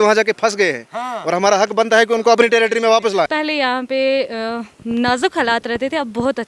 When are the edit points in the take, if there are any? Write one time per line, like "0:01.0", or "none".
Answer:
0:03.3